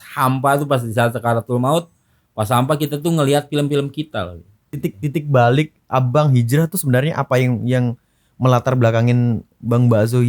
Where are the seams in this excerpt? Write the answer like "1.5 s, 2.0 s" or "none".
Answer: 4.8 s